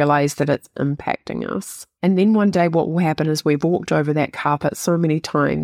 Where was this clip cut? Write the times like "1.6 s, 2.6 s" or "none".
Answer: 1.8 s

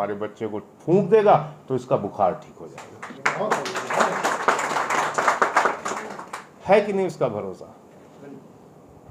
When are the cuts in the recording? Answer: none

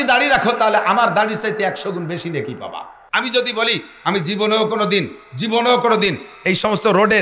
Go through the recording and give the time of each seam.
2.9 s

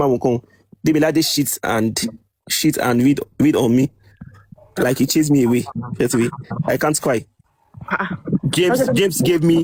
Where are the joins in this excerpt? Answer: none

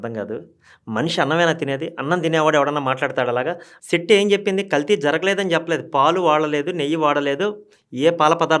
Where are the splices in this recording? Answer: 3.7 s

